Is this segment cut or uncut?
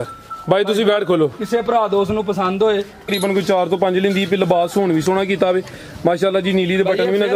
cut